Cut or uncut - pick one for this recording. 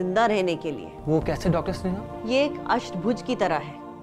cut